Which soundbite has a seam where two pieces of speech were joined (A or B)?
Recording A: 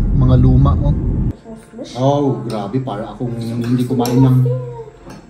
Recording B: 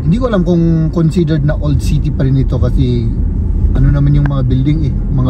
A